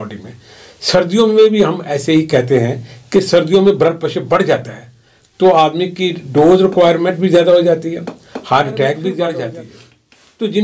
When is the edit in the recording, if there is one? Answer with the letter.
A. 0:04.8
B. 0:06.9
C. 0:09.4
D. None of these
C